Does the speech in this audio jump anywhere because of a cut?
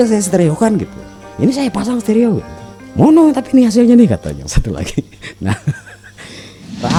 no; 0 cuts

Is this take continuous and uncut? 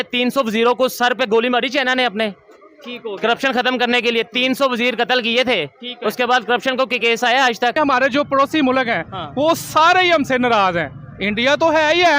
no; 1 cut; at 7.8 s

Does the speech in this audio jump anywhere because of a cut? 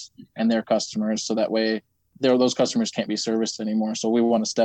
yes; 1 cut; at 2.1 s

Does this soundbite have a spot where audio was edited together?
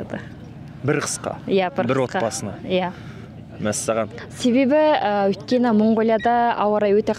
no; 0 cuts

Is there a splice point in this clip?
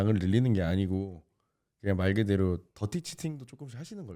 no; 0 cuts

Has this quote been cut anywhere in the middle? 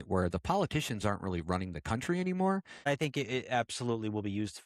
yes; 1 cut; at 2.9 s

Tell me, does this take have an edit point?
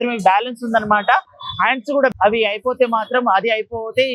no; 0 cuts

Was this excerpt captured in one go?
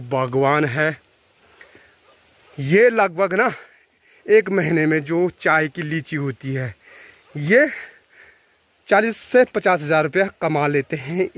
yes; 0 cuts

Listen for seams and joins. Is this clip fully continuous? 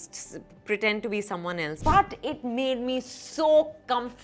no; 1 cut; at 1.7 s

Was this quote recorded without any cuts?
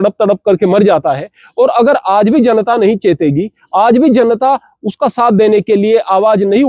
yes; 0 cuts

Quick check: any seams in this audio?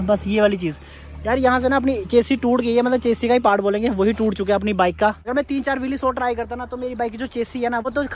no; 0 cuts

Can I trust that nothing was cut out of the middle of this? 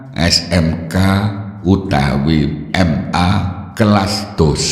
no; 1 cut; at 3.2 s

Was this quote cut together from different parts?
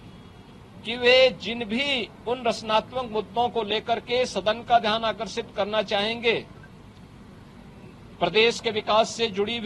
no; 0 cuts

